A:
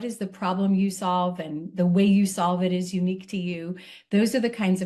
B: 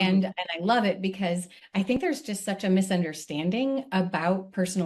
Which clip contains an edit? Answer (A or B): B